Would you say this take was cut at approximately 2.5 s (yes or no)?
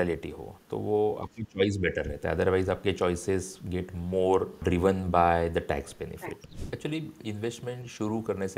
no